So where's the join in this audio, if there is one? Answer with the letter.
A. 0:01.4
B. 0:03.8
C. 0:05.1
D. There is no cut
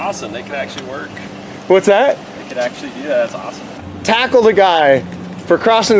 B